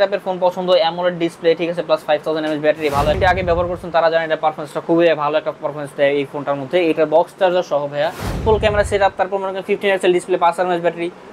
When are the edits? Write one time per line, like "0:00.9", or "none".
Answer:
0:03.2
0:08.3